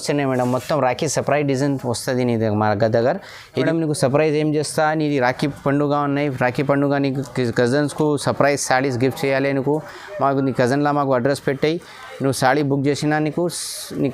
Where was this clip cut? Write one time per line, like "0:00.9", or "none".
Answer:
0:03.6